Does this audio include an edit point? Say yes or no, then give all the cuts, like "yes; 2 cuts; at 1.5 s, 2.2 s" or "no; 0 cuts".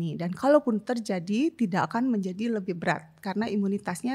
no; 0 cuts